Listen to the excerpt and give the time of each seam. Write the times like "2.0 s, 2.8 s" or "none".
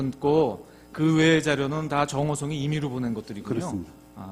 none